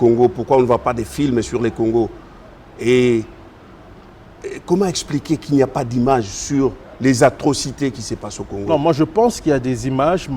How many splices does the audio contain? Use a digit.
0